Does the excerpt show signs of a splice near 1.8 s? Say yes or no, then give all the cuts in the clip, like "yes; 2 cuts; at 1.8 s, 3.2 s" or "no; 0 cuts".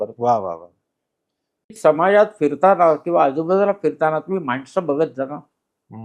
yes; 1 cut; at 1.8 s